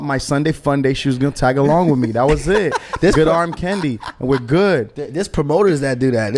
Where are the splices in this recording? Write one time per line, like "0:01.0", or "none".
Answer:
none